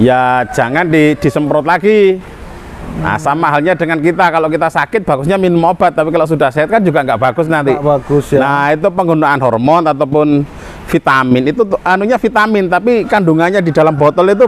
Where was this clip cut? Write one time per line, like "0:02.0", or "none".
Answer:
none